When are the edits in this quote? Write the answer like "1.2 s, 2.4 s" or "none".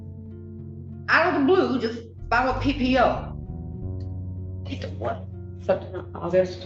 3.2 s, 4.6 s